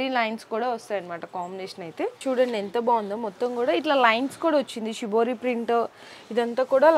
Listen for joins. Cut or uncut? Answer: cut